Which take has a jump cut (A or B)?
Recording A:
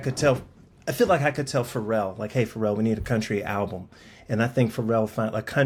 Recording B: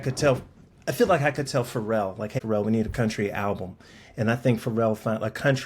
B